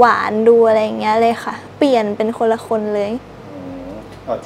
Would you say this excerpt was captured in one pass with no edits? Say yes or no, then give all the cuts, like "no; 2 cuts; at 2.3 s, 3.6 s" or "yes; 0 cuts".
yes; 0 cuts